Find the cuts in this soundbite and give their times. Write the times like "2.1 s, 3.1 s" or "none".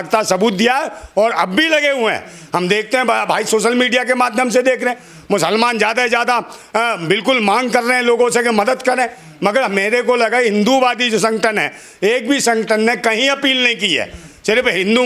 none